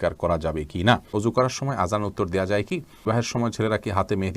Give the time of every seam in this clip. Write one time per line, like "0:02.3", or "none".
0:01.1
0:03.0